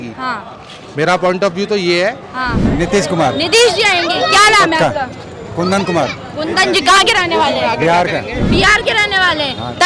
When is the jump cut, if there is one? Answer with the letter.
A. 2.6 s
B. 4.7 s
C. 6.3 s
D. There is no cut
A